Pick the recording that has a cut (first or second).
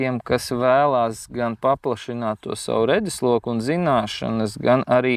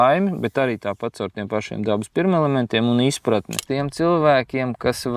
second